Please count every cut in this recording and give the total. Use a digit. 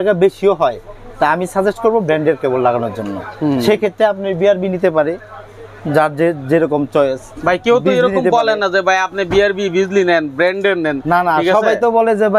0